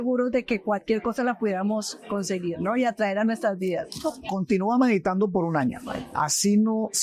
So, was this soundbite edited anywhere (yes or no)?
yes